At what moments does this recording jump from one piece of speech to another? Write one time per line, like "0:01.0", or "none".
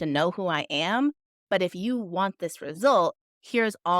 none